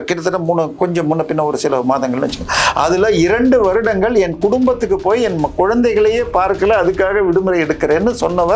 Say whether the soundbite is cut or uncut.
uncut